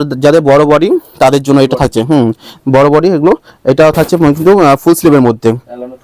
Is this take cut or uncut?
uncut